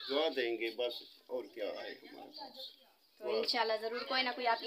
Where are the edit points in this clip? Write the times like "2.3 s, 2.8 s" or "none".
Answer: none